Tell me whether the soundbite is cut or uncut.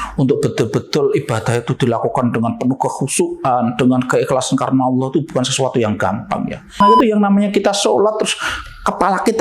cut